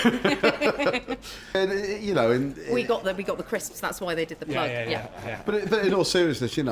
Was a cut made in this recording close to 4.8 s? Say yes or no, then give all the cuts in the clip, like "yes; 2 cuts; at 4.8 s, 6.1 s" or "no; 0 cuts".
no; 1 cut; at 1.5 s